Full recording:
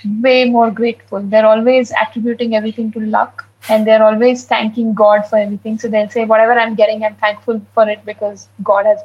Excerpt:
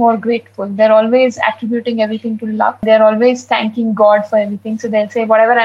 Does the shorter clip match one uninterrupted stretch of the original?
no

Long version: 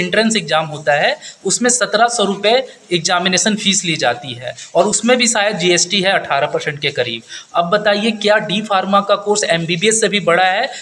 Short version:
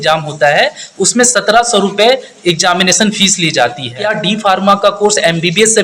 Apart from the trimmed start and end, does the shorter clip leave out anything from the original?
yes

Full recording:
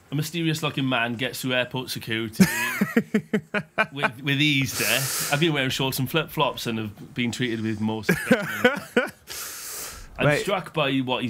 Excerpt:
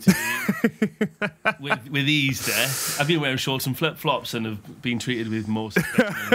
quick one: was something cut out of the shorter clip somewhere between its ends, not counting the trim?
no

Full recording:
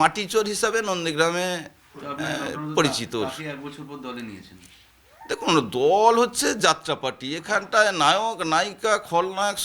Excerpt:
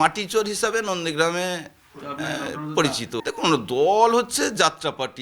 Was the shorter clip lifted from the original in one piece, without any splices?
no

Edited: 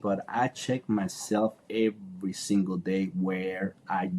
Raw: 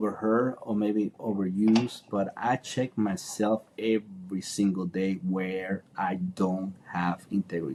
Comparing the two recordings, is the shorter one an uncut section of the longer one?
yes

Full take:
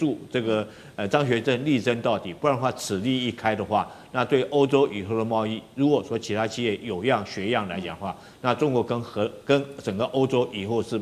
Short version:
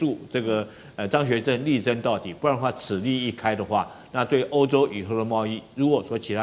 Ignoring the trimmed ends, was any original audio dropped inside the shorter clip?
no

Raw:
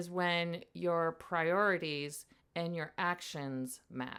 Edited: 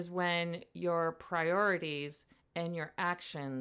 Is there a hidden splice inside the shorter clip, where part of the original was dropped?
no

